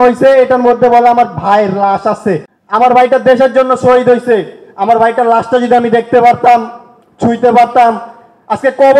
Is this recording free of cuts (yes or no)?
no